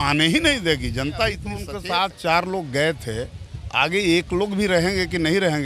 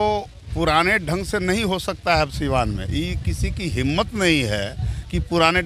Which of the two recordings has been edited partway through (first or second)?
first